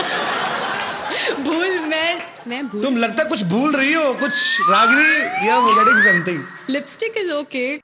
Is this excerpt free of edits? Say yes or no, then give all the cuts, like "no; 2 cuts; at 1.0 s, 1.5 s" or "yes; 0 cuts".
no; 1 cut; at 6.2 s